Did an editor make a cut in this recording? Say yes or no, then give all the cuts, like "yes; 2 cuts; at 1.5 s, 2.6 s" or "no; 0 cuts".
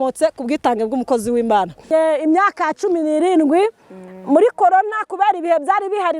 yes; 1 cut; at 1.9 s